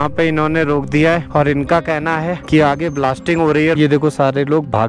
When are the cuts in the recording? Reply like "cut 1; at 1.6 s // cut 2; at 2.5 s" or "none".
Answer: cut 1; at 3.8 s